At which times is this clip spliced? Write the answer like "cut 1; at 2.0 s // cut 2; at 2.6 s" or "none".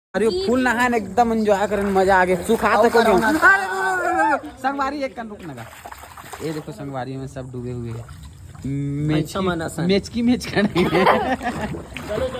none